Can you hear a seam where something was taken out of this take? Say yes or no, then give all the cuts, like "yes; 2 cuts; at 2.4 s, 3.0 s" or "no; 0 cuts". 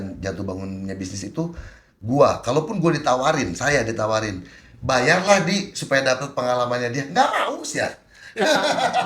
yes; 1 cut; at 1.9 s